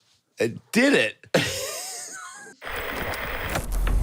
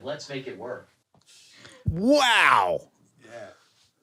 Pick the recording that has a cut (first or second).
first